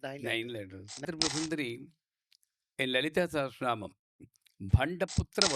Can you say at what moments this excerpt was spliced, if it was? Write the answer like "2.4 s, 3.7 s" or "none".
1.0 s